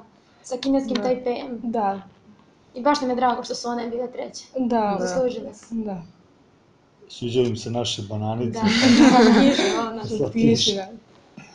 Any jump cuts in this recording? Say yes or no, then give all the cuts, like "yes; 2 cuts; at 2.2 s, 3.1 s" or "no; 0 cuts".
no; 0 cuts